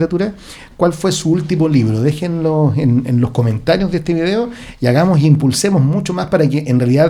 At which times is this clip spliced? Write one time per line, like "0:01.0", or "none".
none